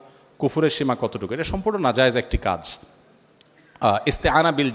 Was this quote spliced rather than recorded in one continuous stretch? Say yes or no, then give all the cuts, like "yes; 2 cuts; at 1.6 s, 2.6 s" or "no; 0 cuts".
no; 0 cuts